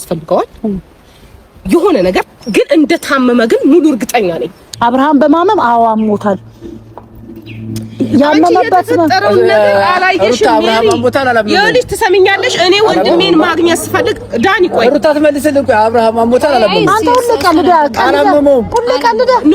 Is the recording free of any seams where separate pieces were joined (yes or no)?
no